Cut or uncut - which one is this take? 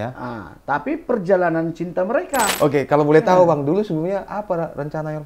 cut